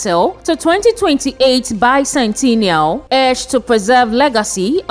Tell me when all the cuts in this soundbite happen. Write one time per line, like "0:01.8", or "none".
none